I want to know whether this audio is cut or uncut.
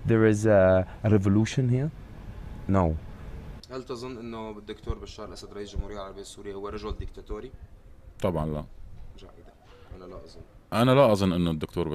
cut